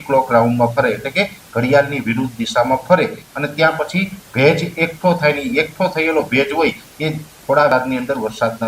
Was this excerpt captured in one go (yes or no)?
no